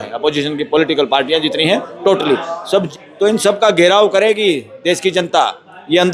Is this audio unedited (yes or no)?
no